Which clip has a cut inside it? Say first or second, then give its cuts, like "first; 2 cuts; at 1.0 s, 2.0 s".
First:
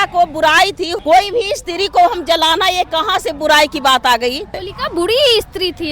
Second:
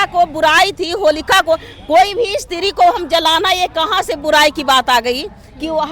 first; 2 cuts; at 0.9 s, 4.7 s